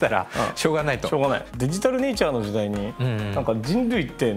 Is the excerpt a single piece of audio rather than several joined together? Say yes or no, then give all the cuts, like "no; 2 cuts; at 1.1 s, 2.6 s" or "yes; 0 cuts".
no; 1 cut; at 1.5 s